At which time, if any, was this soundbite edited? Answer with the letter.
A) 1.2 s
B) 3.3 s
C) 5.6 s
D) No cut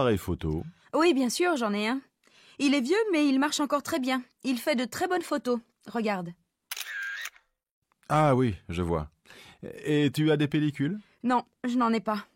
B